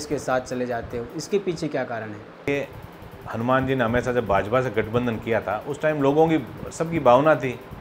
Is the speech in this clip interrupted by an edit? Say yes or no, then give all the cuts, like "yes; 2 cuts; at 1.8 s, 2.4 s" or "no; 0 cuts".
no; 0 cuts